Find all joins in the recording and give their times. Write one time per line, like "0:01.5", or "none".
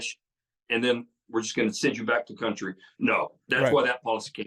none